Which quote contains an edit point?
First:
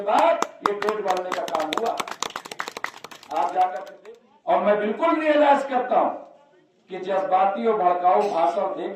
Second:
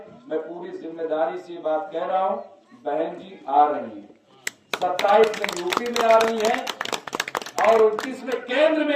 first; 1 cut; at 3.9 s

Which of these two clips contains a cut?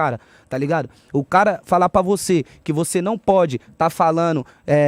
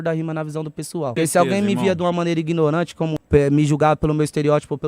second; 2 cuts; at 1.1 s, 3.2 s

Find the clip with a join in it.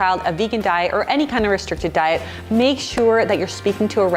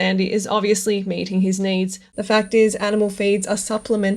second; 1 cut; at 2.1 s

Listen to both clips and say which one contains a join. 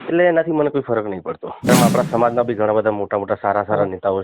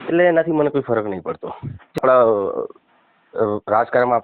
first; 1 cut; at 1.7 s

